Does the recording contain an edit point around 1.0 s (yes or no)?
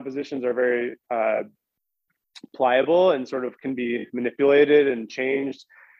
no